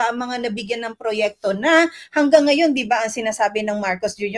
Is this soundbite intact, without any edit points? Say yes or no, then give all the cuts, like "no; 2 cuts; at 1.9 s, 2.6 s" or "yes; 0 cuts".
yes; 0 cuts